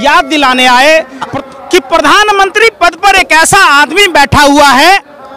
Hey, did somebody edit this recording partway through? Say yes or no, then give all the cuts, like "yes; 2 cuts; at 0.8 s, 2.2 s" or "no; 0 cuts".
yes; 1 cut; at 1.3 s